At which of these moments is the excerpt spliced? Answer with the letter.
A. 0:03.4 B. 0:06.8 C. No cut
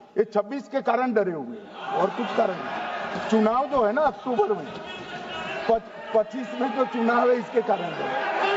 C